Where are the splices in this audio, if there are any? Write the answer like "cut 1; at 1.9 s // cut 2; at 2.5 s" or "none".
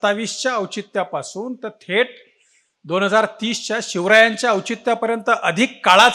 none